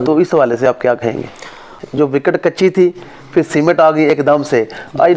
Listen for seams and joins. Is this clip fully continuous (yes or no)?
no